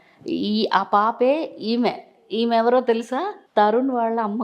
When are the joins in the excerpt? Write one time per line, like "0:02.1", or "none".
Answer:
0:03.4